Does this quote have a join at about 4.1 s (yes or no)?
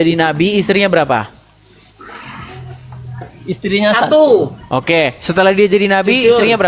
no